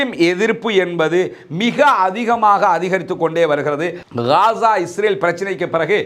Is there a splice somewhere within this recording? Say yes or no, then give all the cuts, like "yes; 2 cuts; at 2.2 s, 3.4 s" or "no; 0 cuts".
no; 0 cuts